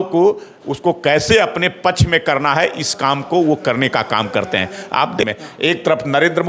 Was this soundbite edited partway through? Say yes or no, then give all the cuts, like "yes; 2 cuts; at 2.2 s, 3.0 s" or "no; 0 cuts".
yes; 1 cut; at 5.2 s